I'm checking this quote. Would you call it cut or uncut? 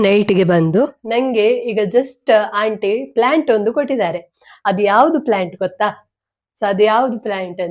cut